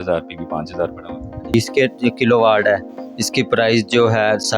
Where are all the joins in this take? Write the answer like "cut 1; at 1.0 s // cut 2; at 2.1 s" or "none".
cut 1; at 1.5 s

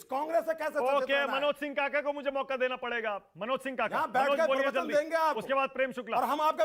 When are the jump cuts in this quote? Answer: none

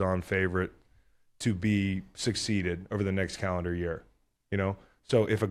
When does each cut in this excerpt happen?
none

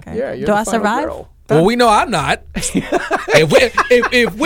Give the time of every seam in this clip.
cut 1; at 1.4 s

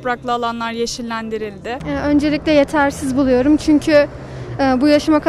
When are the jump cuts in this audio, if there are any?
cut 1; at 1.8 s

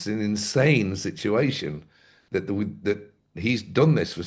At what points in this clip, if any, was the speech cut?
none

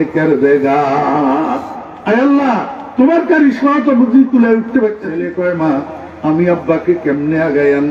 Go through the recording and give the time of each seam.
cut 1; at 5.3 s

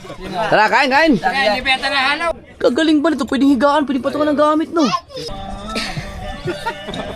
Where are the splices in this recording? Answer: cut 1; at 2.4 s // cut 2; at 5.3 s

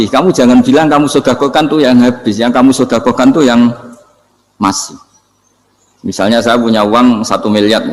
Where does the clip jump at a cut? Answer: none

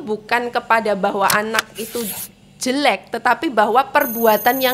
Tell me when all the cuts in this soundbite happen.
none

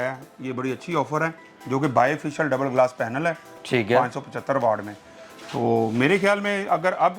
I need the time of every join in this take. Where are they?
none

